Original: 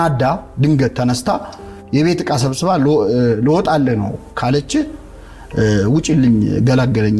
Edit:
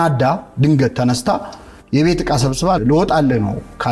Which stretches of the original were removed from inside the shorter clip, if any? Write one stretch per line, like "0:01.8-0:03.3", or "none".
0:02.8-0:03.4